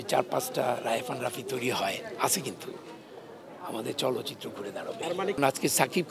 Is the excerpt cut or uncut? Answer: uncut